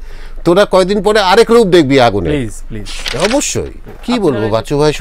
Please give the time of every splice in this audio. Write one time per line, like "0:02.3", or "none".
0:03.8